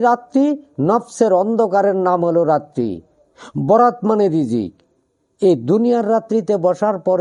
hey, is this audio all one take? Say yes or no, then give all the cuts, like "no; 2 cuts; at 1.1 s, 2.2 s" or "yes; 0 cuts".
yes; 0 cuts